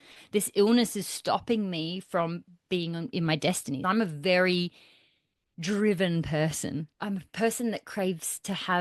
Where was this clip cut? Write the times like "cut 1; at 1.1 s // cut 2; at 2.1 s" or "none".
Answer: cut 1; at 6.9 s